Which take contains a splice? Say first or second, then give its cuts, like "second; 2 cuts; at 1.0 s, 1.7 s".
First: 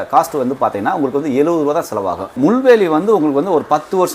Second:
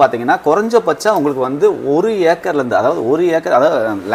first; 1 cut; at 2.2 s